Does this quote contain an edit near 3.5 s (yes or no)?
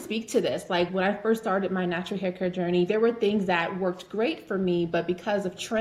no